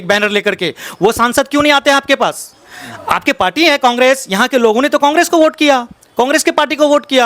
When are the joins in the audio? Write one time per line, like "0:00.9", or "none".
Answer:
none

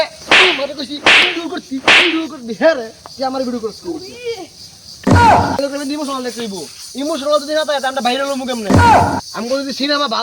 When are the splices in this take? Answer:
0:05.6

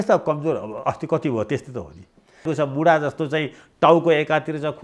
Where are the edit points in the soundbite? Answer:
0:02.5

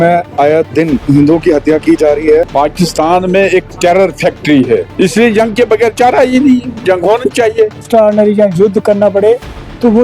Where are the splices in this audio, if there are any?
0:01.0
0:02.5
0:04.9
0:07.8

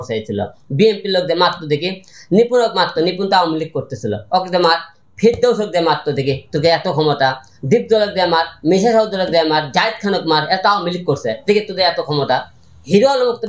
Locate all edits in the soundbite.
none

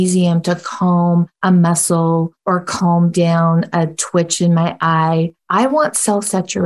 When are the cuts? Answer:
0:01.3
0:02.3
0:05.4

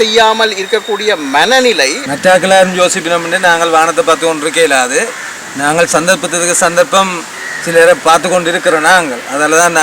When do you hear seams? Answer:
0:02.0

